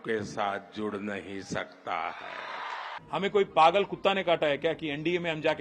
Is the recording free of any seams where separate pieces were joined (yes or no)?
no